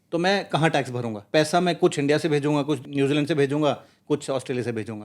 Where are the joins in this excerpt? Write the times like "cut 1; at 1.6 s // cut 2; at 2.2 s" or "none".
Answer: cut 1; at 1.3 s // cut 2; at 2.9 s